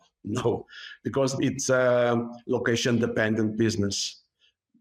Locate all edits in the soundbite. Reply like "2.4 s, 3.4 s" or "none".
none